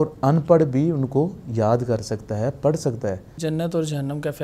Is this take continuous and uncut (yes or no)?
no